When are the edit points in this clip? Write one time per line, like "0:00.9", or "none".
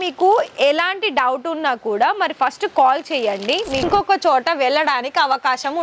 0:03.8